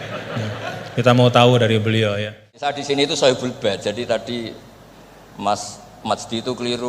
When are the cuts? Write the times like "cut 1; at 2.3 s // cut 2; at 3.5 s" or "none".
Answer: cut 1; at 2.5 s